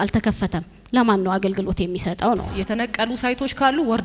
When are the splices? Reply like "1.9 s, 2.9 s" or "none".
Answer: 2.5 s

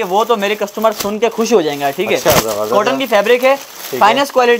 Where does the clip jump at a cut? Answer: none

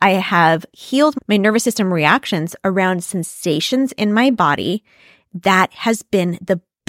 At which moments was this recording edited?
1.1 s

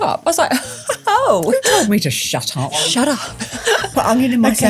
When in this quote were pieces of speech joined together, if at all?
2.7 s, 3.9 s

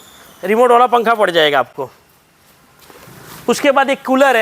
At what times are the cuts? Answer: none

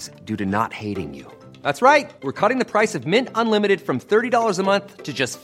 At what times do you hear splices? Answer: none

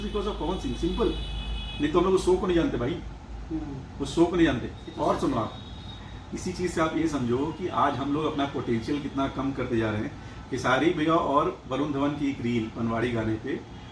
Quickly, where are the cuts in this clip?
none

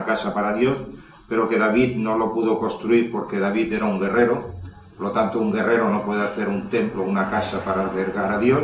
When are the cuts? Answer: none

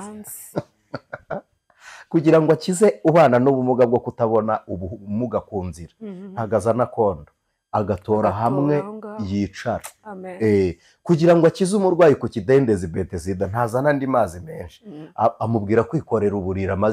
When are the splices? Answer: none

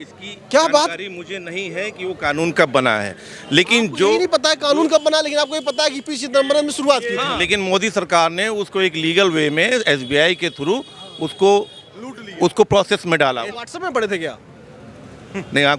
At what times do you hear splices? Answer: 7.4 s, 13.5 s

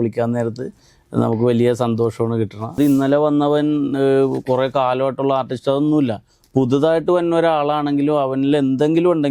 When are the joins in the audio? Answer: 2.8 s

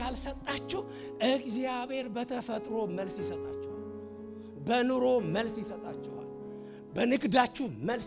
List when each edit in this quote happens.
none

